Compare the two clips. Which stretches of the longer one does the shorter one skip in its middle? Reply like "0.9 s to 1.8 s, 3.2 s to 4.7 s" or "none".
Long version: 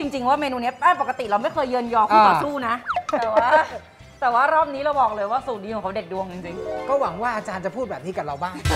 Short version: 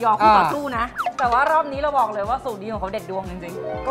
2.9 s to 4.0 s